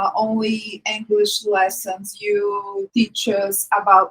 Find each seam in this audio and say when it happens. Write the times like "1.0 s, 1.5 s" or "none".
2.9 s